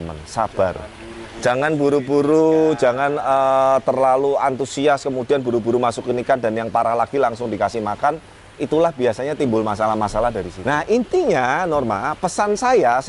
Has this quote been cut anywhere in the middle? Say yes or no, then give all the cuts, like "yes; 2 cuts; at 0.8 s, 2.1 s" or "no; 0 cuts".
yes; 1 cut; at 10.5 s